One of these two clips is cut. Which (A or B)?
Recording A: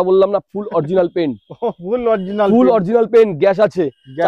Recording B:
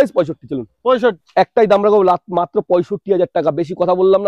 B